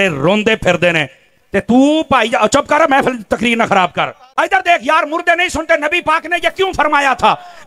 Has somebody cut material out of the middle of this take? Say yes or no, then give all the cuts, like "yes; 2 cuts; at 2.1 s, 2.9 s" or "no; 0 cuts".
yes; 1 cut; at 4.2 s